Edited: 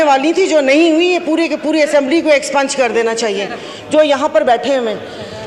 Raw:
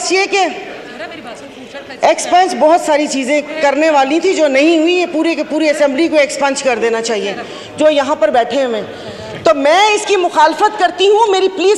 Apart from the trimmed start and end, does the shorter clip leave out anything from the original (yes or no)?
no